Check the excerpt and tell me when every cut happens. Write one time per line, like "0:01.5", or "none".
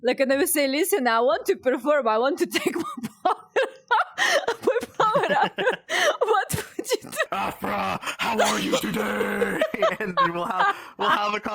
0:07.3